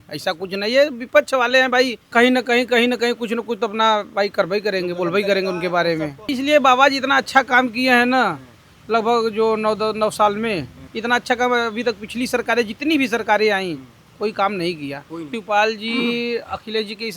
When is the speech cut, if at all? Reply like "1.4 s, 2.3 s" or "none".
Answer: 2.0 s, 6.2 s, 10.8 s, 15.3 s